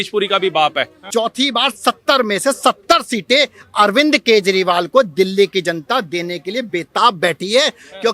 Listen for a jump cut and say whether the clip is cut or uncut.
cut